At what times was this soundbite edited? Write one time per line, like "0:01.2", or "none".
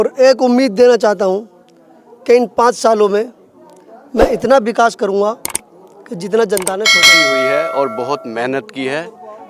0:07.1